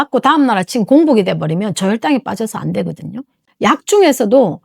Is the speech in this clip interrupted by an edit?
yes; 1 cut; at 3.5 s

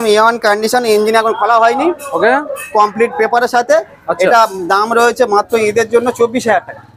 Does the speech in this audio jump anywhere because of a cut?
no; 0 cuts

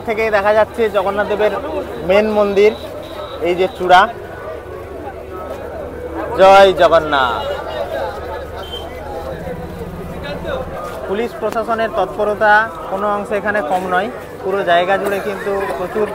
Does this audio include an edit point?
no; 0 cuts

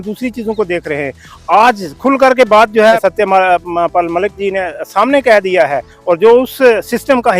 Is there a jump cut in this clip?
yes; 1 cut; at 3.0 s

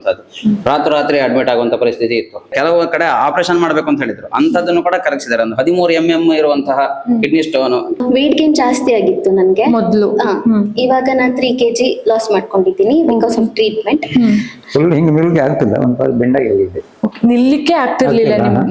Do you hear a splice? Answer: yes; 3 cuts; at 2.5 s, 8.0 s, 14.6 s

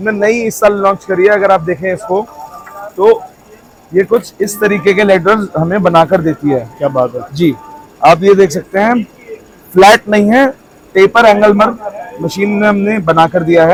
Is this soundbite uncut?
yes; 0 cuts

